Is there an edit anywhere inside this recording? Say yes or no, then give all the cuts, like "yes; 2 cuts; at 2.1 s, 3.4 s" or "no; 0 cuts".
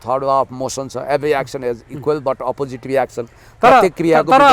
no; 0 cuts